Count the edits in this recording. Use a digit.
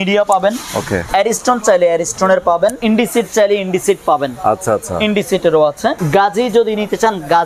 3